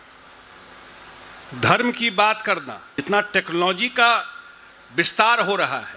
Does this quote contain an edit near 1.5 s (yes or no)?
no